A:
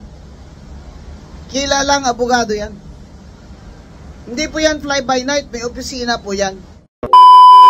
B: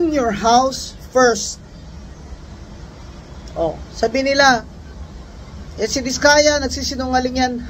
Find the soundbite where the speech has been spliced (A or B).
A